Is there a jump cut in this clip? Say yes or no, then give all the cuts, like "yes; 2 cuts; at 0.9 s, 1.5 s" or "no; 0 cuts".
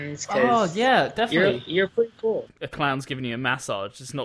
yes; 1 cut; at 2.6 s